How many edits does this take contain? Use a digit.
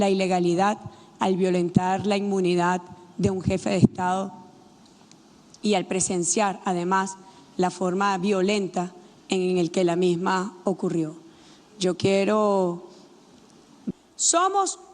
1